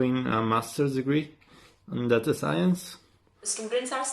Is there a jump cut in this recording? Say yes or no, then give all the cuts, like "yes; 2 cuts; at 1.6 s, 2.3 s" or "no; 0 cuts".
yes; 1 cut; at 3.2 s